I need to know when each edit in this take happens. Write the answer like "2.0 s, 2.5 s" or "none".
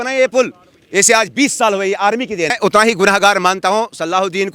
2.5 s